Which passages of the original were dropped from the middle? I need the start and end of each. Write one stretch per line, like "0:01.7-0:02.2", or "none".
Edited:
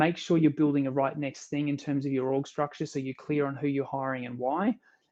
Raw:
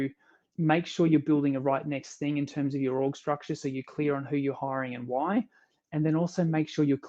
none